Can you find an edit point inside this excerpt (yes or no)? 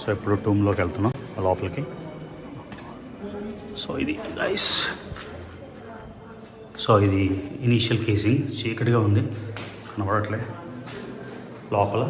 no